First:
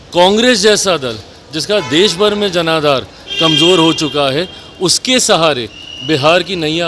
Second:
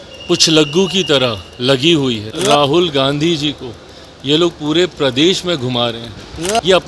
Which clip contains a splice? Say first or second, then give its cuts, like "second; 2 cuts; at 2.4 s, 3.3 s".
second; 1 cut; at 2.3 s